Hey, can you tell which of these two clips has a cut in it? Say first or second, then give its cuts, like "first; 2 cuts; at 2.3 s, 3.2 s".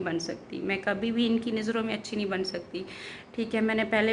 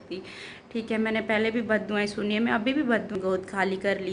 second; 1 cut; at 3.1 s